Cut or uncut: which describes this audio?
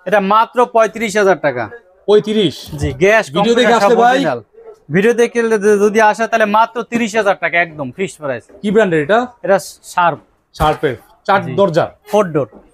uncut